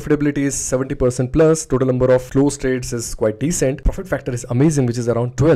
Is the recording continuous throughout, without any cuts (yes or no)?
yes